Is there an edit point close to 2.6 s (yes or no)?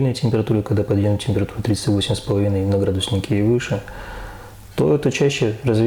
no